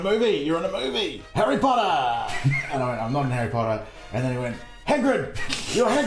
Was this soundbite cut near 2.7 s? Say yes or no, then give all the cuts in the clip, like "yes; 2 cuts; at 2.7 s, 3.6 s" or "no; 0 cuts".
yes; 2 cuts; at 1.2 s, 2.7 s